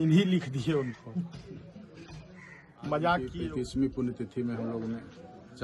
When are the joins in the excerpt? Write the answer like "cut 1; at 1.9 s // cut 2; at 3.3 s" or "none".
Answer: cut 1; at 3.3 s